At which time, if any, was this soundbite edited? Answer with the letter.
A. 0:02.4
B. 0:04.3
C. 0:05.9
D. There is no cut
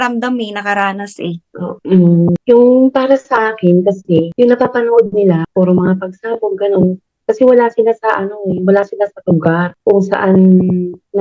D